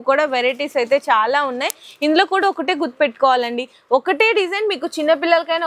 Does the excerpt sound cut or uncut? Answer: uncut